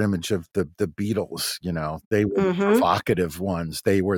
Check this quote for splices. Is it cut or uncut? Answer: uncut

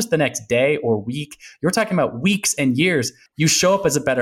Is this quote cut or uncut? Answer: cut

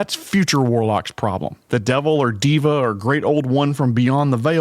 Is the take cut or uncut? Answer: cut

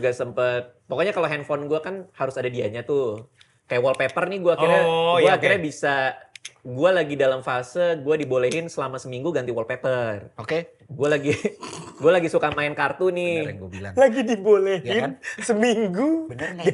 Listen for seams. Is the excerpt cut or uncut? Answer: uncut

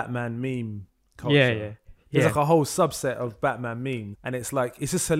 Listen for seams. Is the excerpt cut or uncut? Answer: cut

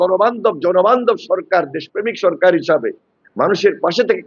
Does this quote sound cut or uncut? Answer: uncut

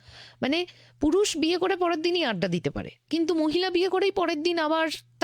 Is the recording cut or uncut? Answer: cut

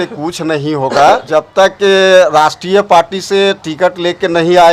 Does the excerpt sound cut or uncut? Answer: cut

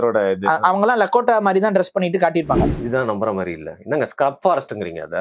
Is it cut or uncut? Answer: cut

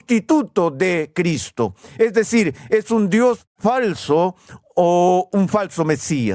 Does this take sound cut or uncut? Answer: uncut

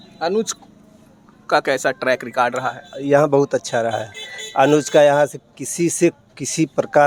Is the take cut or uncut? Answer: uncut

